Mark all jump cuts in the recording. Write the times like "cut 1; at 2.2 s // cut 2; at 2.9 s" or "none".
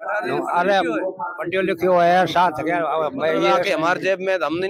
cut 1; at 3.6 s